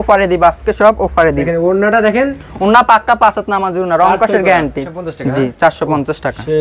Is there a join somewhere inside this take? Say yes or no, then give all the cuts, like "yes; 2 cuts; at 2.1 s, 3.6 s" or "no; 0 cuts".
yes; 2 cuts; at 1.4 s, 4.8 s